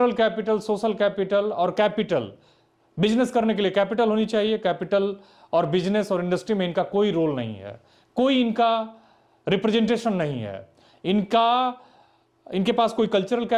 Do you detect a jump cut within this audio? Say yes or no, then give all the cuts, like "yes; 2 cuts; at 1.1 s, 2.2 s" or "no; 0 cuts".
no; 0 cuts